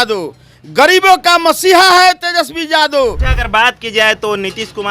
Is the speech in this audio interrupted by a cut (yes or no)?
yes